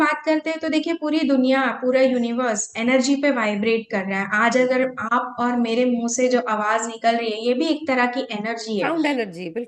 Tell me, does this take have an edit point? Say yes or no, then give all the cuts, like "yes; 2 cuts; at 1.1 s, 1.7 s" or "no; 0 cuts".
no; 0 cuts